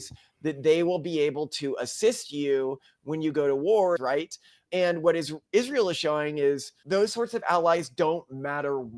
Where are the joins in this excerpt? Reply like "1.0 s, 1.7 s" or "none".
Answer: 4.0 s, 6.7 s